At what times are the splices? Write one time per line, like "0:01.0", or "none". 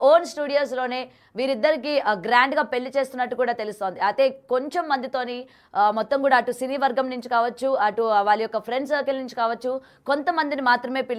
none